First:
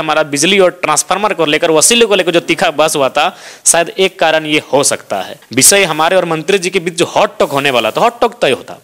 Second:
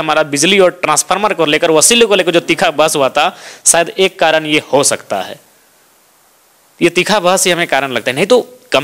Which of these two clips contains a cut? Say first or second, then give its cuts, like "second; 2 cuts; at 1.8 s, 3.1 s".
first; 1 cut; at 5.4 s